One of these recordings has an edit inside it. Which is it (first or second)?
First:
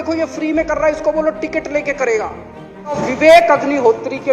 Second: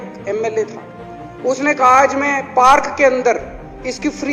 first